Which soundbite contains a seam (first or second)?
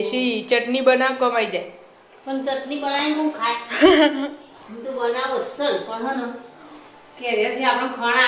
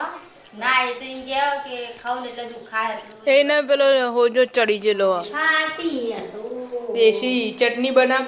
second